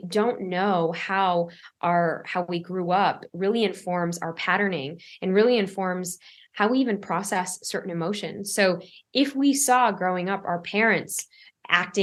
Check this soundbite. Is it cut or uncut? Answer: uncut